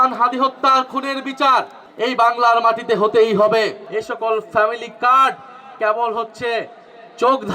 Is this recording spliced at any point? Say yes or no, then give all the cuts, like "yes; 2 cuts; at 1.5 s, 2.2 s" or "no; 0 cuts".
yes; 2 cuts; at 1.8 s, 3.8 s